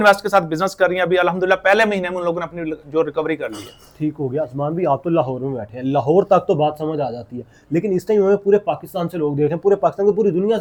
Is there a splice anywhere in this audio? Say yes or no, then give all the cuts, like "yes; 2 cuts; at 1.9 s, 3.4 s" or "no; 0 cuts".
no; 0 cuts